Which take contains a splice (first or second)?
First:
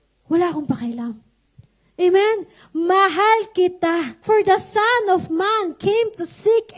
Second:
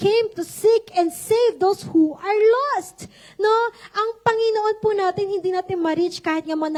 first